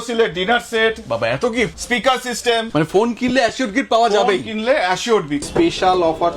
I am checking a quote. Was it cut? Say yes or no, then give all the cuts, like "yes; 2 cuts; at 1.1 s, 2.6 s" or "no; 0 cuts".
yes; 3 cuts; at 1.8 s, 2.7 s, 5.5 s